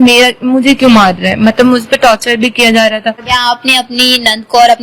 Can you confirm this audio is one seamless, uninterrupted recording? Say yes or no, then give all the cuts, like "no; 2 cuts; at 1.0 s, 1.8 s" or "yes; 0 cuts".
no; 1 cut; at 3.2 s